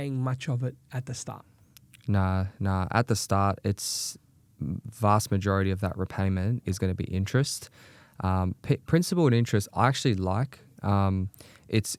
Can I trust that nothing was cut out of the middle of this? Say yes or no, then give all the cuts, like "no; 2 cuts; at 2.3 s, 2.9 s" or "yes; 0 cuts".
yes; 0 cuts